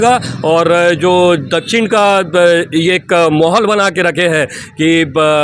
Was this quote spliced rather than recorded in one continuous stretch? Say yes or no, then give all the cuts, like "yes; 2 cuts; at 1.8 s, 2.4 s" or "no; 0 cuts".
no; 0 cuts